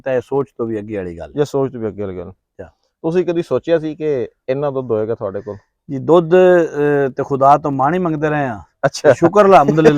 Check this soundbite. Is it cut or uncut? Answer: uncut